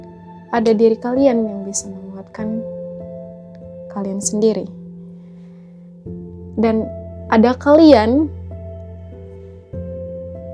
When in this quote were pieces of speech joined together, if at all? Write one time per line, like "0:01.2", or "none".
none

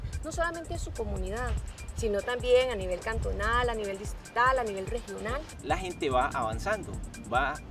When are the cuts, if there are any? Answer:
0:05.5

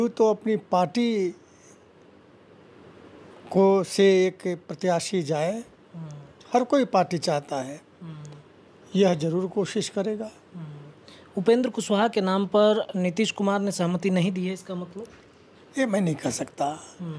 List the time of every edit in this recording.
none

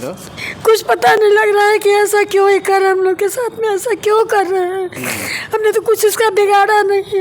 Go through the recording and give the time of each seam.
none

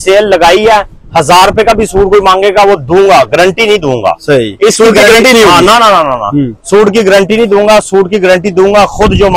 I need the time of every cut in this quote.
none

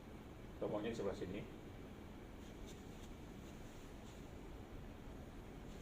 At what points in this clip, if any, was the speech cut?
0:03.5

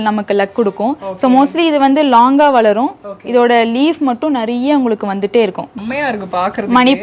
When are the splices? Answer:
0:05.6

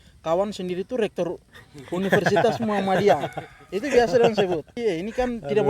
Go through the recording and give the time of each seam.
0:04.7

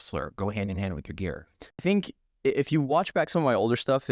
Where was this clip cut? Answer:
0:01.8

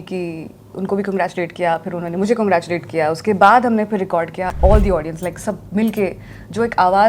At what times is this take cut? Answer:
0:04.5

